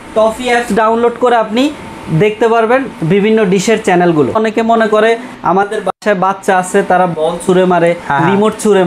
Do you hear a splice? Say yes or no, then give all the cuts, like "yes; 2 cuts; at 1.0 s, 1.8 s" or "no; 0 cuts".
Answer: yes; 1 cut; at 4.3 s